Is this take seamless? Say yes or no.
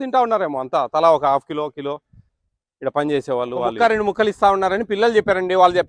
no